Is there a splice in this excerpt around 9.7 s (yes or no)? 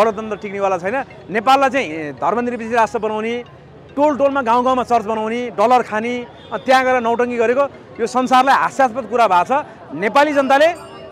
yes